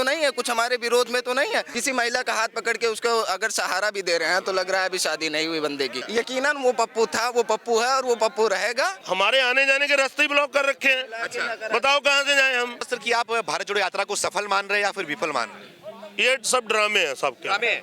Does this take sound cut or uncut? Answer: cut